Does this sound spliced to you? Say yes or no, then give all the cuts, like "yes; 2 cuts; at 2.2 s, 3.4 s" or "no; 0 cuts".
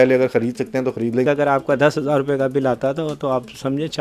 yes; 1 cut; at 1.2 s